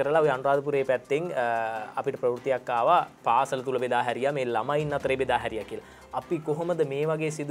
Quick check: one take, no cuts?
yes; 0 cuts

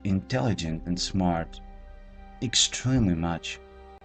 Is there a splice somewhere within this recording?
no; 0 cuts

